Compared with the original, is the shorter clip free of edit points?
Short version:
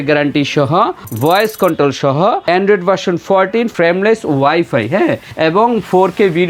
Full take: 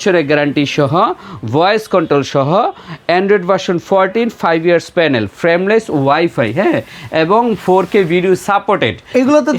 no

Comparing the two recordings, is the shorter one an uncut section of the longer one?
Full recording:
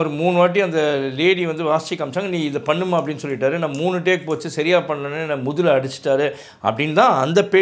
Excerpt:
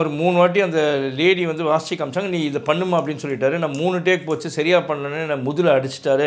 yes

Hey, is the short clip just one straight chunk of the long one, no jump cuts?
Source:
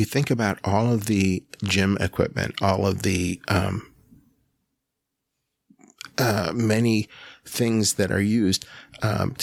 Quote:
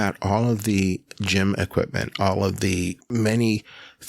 no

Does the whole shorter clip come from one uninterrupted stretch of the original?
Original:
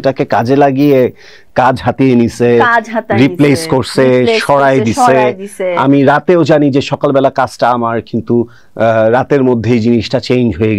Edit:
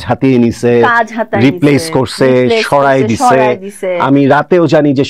yes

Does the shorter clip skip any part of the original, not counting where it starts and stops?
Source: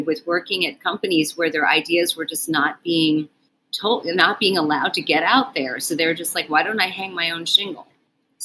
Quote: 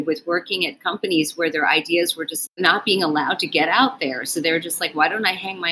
yes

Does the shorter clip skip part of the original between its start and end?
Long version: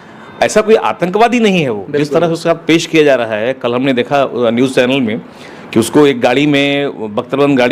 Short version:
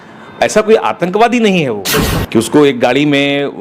yes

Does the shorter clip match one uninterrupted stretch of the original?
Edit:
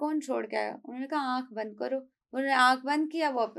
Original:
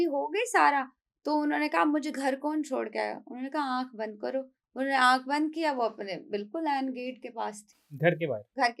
yes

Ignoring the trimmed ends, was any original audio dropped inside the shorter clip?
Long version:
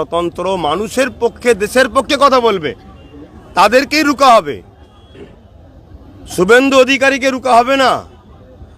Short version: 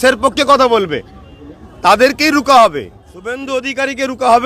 yes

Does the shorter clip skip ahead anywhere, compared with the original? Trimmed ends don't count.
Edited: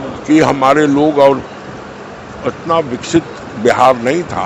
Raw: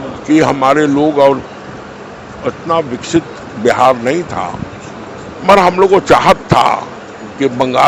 no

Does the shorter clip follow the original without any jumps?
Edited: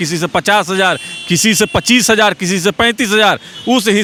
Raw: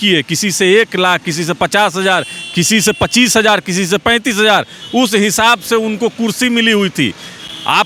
yes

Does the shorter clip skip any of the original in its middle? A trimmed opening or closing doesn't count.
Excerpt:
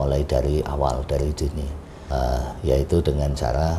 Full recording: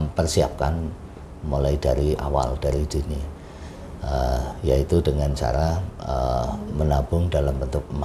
yes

